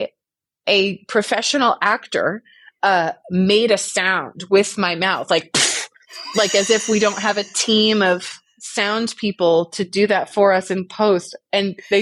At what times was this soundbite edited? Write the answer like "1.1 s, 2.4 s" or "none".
none